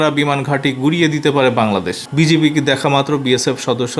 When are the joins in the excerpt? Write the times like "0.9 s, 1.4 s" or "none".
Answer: 2.0 s